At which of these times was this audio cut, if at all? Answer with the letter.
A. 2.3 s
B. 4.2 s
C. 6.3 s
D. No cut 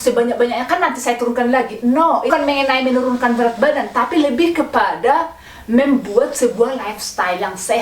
A